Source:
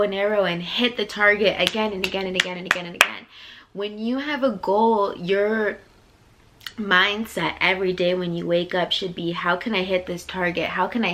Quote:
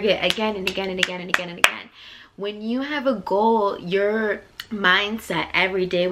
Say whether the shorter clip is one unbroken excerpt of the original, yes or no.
no